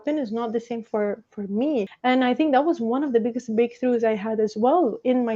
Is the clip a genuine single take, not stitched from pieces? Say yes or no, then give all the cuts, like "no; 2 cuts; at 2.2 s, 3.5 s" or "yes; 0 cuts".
no; 1 cut; at 1.9 s